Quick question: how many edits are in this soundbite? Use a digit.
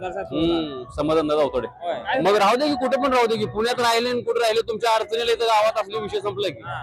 1